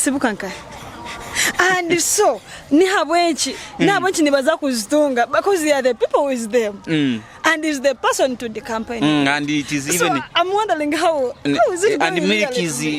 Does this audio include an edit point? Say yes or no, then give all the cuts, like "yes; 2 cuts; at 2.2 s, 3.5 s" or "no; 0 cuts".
no; 0 cuts